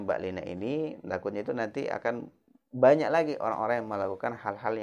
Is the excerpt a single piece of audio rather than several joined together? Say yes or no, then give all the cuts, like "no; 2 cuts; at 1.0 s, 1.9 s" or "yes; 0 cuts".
yes; 0 cuts